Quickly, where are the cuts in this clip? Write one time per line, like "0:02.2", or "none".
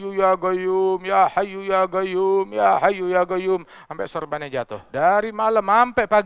0:04.8